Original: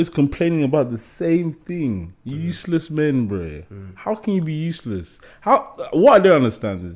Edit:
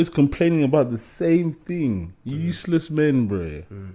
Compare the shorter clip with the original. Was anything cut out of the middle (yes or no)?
no